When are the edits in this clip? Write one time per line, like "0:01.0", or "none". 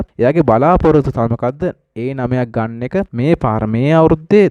none